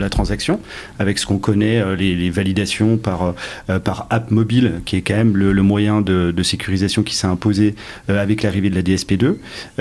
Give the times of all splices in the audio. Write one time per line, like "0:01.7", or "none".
none